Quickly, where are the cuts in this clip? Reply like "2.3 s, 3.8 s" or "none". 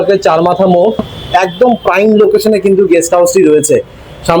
1.1 s

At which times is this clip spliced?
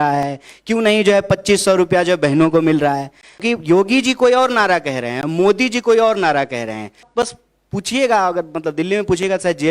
3.4 s, 7.1 s

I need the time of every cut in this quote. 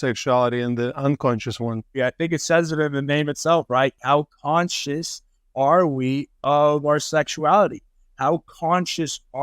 2.0 s, 4.0 s

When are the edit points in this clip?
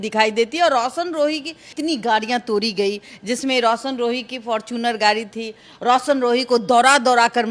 1.7 s

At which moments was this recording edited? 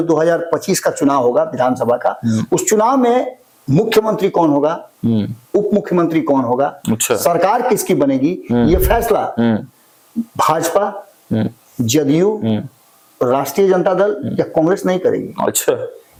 none

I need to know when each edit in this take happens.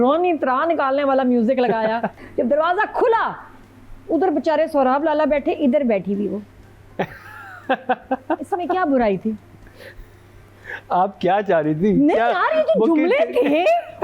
2.2 s

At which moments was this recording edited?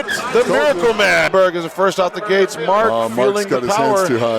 1.3 s

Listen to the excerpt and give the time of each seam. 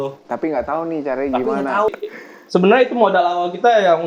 1.9 s

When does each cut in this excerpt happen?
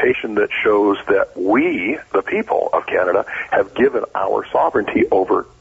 none

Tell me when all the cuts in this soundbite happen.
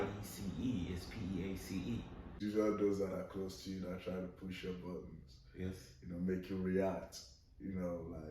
2.3 s

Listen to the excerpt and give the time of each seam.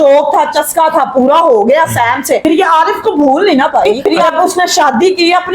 4.2 s

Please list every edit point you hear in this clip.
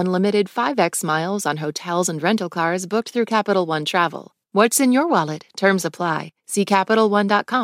4.3 s

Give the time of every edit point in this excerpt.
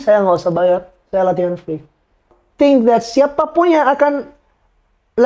2.4 s

